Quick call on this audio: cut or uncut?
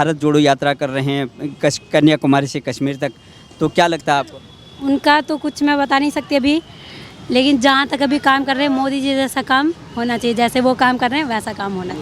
uncut